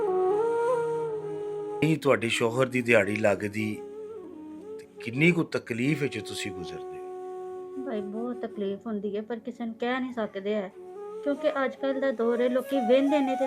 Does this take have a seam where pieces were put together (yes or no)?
yes